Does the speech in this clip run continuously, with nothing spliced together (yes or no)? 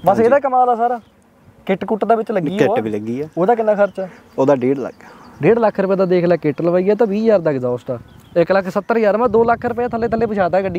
yes